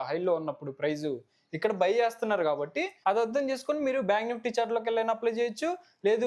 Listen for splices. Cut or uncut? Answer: cut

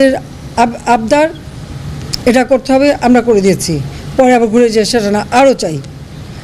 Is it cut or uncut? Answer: uncut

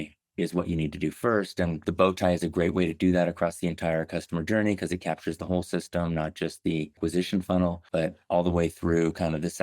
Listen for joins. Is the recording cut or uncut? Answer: cut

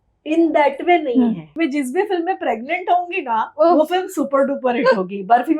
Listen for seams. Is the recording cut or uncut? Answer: cut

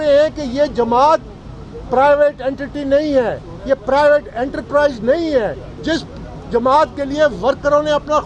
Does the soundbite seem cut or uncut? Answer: cut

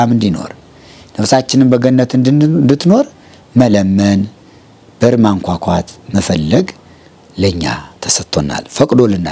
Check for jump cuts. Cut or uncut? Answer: uncut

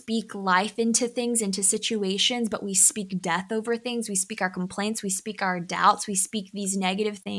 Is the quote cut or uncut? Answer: uncut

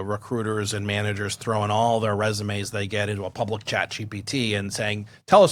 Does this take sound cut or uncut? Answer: uncut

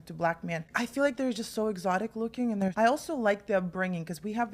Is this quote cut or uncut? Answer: cut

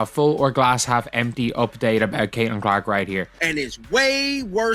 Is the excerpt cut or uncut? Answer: cut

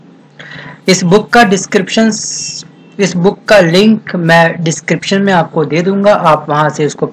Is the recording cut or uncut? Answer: cut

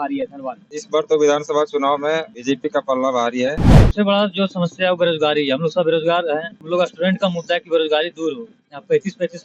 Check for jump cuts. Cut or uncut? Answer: cut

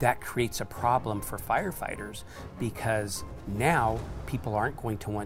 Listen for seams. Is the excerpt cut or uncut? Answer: uncut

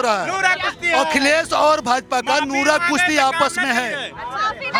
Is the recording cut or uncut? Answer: uncut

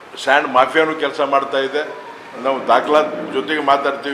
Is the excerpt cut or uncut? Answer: cut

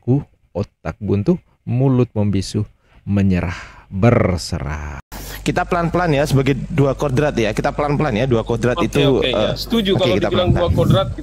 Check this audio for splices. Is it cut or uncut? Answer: cut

